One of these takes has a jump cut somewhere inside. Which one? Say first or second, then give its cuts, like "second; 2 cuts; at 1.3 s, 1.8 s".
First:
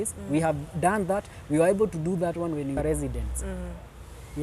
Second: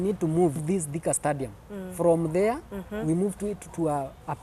first; 1 cut; at 2.9 s